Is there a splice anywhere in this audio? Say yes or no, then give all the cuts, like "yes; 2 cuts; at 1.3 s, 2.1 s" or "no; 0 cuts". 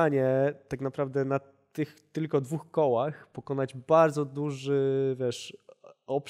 no; 0 cuts